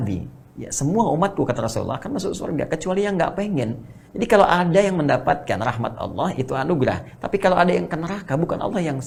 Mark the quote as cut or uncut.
uncut